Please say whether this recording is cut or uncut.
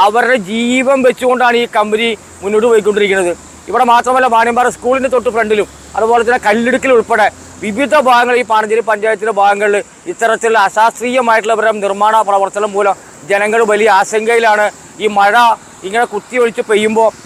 uncut